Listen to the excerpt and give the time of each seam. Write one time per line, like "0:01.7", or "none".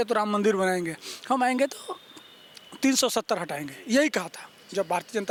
none